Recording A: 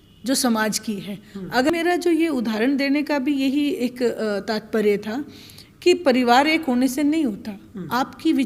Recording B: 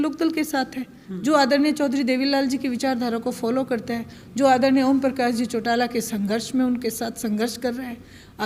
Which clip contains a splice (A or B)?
A